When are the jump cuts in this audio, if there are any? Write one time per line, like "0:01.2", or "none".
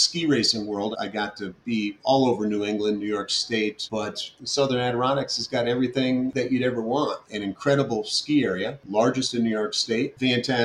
0:00.9
0:04.2
0:06.3